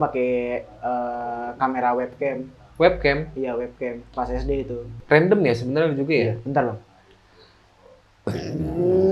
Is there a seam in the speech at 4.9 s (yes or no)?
yes